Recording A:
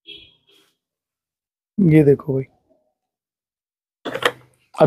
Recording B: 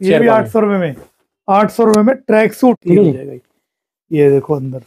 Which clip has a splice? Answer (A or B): B